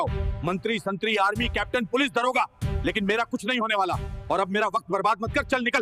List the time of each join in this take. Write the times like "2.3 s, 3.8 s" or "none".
none